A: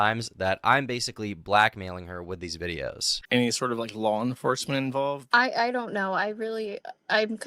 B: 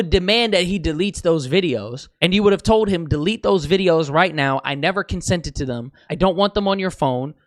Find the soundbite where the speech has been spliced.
A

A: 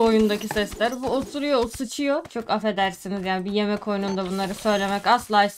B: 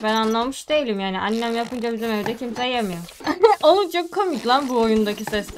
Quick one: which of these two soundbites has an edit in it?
B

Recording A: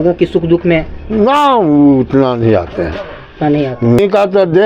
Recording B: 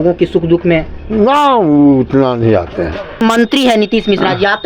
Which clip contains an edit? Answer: B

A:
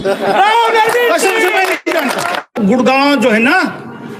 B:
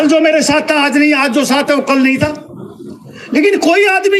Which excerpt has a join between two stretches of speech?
A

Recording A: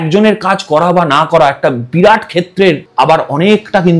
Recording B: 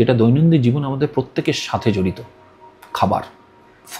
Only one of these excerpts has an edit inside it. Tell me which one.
A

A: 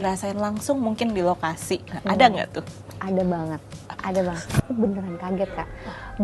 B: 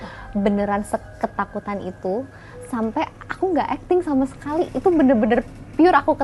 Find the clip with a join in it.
A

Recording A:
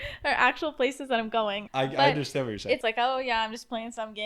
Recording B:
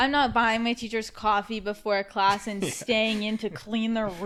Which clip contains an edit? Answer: A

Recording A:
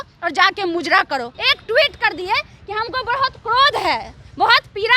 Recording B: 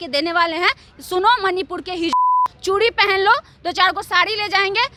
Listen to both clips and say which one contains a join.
A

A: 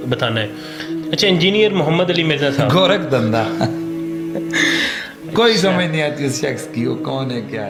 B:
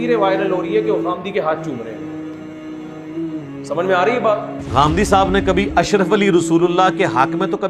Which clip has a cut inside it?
B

